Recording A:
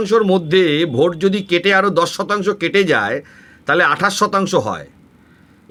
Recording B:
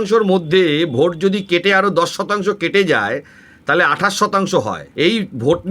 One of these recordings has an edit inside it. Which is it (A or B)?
B